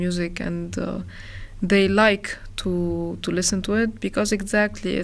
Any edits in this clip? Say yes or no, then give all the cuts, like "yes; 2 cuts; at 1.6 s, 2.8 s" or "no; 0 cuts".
no; 0 cuts